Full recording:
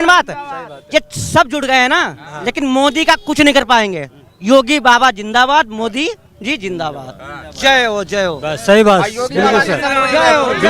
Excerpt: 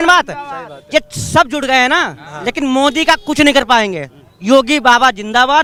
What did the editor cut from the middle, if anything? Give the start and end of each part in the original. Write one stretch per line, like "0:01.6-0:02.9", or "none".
none